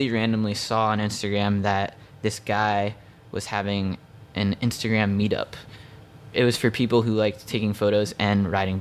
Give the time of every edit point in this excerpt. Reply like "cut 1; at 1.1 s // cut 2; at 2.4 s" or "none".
none